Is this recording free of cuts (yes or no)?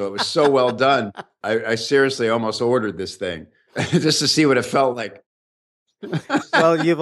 yes